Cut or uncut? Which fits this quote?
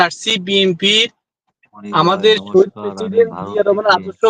uncut